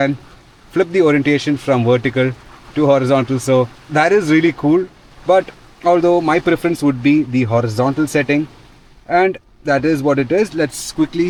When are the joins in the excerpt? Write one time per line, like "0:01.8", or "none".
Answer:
none